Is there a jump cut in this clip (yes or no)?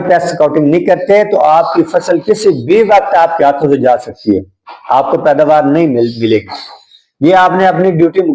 no